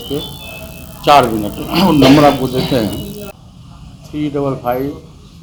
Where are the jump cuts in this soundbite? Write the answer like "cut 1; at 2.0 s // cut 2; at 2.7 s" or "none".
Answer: none